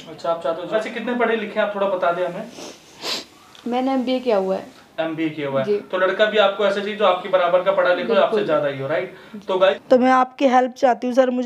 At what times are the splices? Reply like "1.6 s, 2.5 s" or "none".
0.7 s, 9.8 s